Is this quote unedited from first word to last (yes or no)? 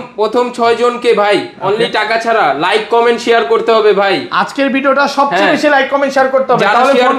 yes